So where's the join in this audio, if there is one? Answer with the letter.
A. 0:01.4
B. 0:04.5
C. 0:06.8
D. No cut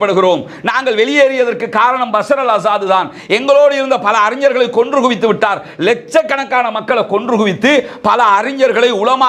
D